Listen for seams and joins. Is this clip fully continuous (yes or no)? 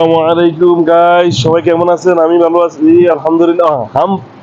yes